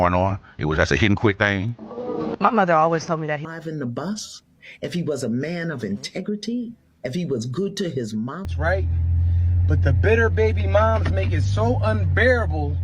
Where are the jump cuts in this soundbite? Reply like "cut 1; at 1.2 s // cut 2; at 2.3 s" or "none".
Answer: cut 1; at 3.4 s // cut 2; at 8.4 s